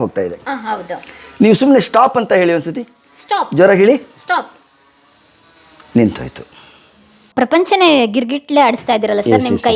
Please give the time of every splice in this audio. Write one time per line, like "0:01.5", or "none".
0:07.2